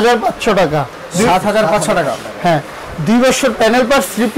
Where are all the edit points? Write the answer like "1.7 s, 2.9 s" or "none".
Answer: none